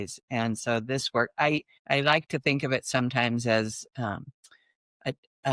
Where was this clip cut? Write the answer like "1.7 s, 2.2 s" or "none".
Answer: 1.7 s